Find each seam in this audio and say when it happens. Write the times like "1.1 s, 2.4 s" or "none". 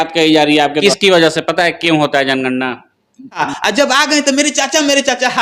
0.8 s, 3.5 s